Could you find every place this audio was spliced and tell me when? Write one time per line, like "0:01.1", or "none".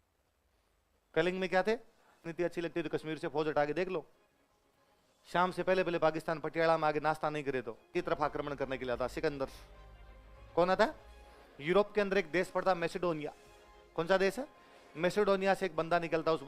0:02.3
0:07.9